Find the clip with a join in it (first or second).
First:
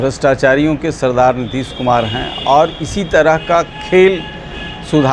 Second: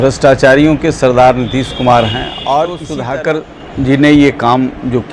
second